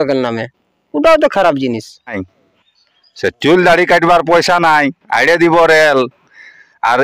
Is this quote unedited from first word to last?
no; 1 cut; at 2.1 s

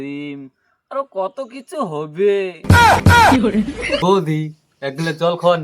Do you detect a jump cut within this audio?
yes; 1 cut; at 4.0 s

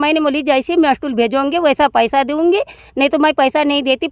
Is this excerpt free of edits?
yes; 0 cuts

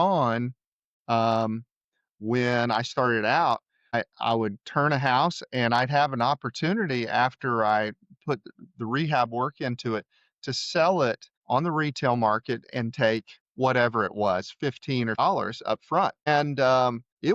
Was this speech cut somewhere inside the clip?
no; 0 cuts

